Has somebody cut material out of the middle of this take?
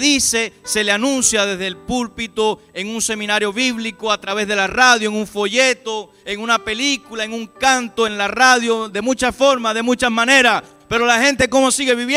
no; 0 cuts

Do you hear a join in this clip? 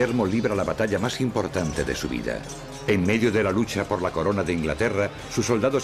yes; 1 cut; at 3.3 s

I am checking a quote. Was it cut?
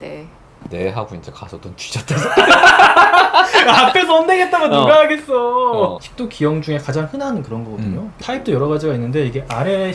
yes; 2 cuts; at 6.0 s, 8.2 s

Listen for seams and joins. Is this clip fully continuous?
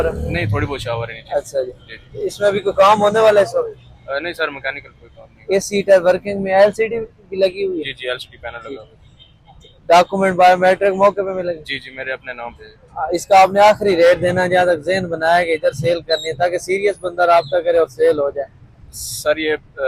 yes; 0 cuts

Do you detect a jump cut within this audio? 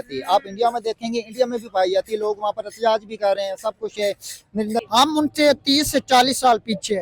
yes; 1 cut; at 4.8 s

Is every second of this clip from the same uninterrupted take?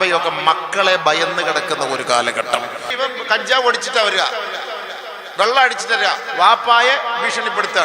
no; 1 cut; at 2.9 s

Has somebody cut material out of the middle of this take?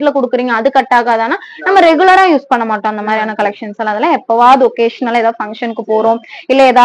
no; 0 cuts

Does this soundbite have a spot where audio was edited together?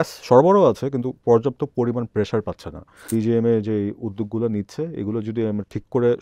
yes; 1 cut; at 3.0 s

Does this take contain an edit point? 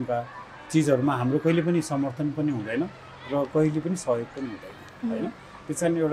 no; 0 cuts

